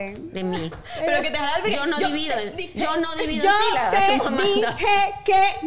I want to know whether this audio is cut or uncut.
uncut